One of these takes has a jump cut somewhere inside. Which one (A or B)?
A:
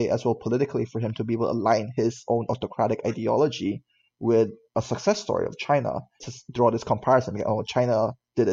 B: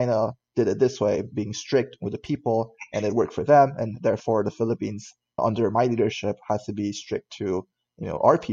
A